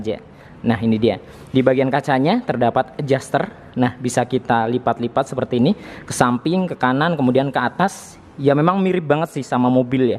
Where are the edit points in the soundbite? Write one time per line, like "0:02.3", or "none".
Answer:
none

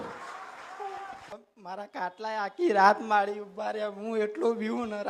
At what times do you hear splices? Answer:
0:01.2

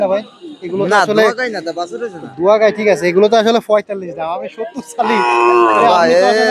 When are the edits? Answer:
none

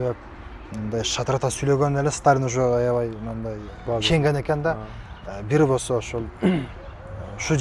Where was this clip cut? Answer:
none

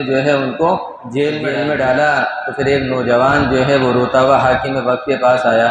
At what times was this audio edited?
0:01.5

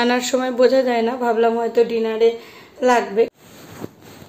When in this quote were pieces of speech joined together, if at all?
0:03.3

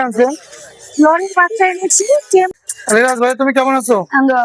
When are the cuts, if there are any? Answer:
0:02.6

